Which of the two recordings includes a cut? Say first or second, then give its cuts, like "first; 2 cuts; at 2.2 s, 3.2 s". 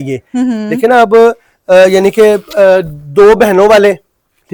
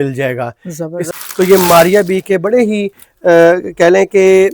second; 1 cut; at 1.1 s